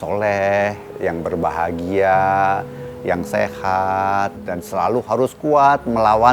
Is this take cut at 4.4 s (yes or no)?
yes